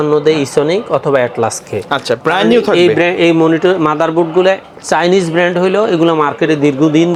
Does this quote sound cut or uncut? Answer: uncut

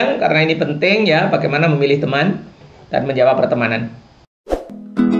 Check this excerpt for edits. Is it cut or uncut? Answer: cut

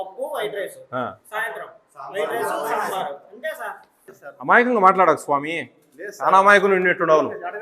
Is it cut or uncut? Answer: cut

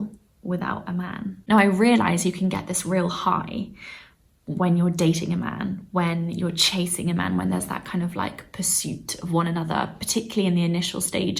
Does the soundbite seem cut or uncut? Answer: cut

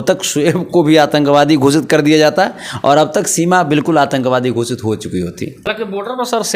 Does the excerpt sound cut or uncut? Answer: cut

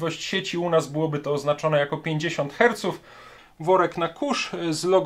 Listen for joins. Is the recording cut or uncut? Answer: cut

